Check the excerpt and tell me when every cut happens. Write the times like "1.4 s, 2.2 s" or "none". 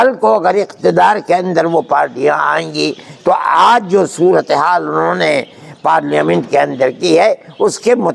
none